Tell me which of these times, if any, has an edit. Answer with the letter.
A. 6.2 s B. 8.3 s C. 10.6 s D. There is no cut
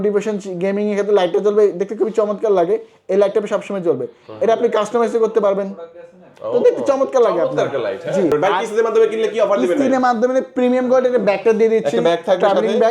B